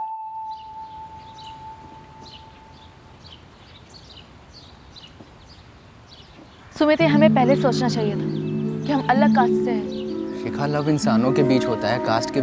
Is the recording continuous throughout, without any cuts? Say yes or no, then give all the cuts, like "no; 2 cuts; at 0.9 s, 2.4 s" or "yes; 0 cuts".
yes; 0 cuts